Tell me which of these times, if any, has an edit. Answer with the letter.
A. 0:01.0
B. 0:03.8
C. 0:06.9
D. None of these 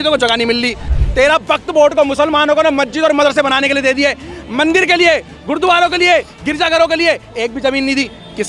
A